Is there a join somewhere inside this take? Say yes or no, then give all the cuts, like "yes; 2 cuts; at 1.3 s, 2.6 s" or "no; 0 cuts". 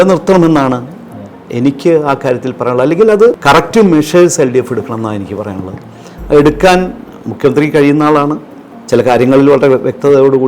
yes; 1 cut; at 3.4 s